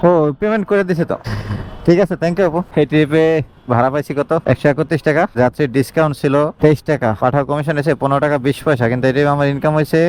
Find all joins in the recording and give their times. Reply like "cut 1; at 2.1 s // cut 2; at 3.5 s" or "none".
none